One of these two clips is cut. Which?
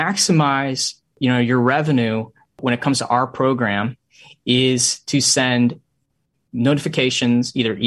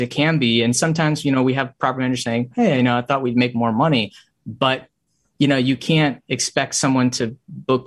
first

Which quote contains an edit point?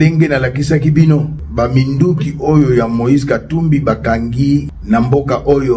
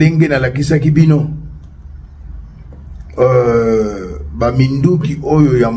first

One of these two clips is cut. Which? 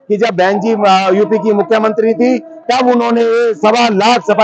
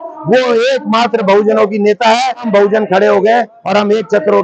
second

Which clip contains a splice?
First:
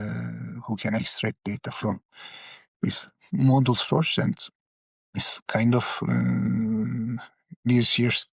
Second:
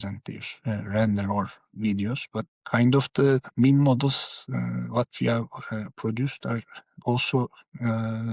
second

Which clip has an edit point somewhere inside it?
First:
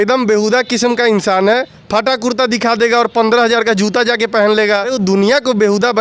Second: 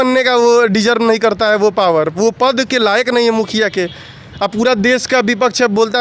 first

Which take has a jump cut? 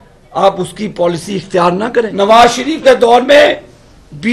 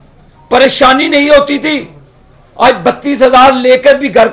first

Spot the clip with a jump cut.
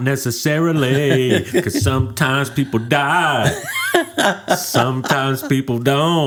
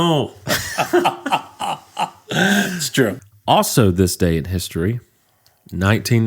second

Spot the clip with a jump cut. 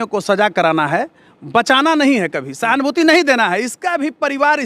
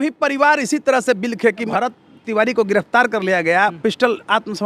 second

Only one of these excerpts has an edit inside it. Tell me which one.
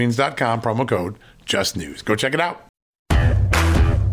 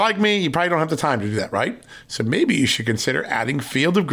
first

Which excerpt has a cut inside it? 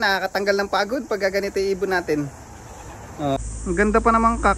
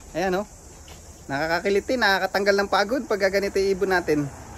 first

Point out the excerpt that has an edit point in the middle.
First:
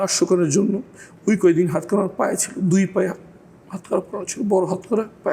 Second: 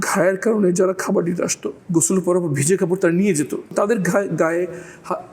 second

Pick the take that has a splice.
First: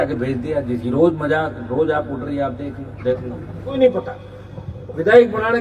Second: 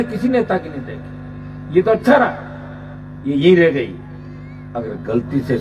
first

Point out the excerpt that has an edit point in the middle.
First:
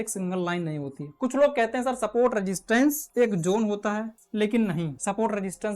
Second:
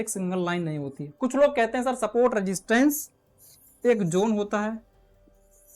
first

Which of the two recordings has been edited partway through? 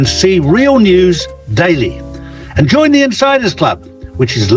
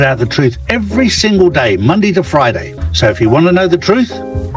second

